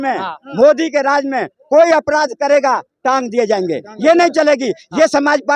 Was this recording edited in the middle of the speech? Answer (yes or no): no